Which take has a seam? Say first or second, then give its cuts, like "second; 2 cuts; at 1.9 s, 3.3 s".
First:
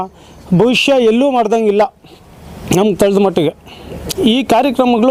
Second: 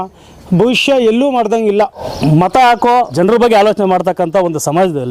second; 2 cuts; at 2.1 s, 3.1 s